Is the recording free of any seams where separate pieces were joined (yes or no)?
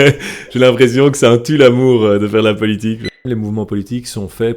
no